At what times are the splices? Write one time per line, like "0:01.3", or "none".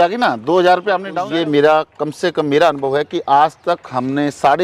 0:01.1